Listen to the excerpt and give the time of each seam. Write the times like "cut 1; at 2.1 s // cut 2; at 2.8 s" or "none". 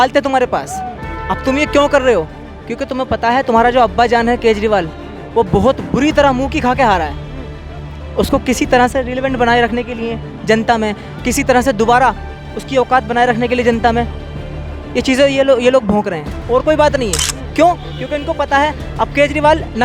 none

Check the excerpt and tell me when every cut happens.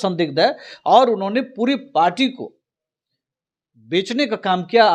none

